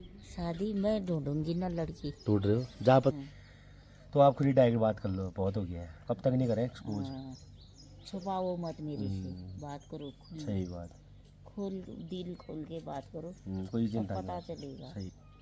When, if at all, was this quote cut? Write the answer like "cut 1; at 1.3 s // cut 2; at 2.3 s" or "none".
none